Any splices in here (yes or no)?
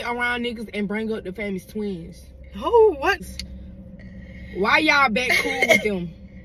yes